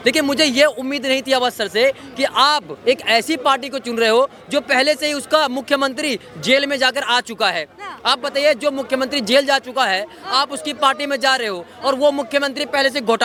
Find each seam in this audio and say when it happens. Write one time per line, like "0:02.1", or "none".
none